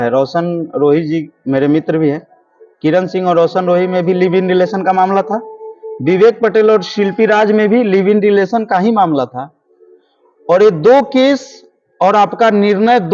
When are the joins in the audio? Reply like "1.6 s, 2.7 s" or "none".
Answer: none